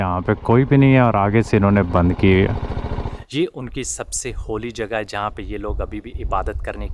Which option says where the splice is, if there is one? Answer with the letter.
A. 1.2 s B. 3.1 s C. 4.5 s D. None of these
B